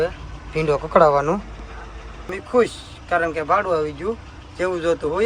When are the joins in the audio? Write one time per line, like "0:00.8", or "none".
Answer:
0:02.4